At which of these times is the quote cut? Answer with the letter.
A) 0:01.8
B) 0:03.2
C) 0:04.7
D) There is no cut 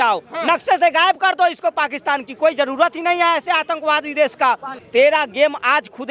C